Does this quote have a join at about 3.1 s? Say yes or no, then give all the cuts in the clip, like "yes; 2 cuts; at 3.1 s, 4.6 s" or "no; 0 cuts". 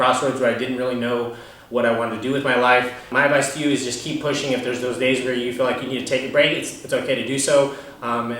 yes; 1 cut; at 3.1 s